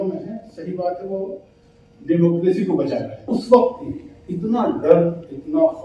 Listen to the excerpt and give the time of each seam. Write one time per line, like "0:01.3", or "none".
0:03.3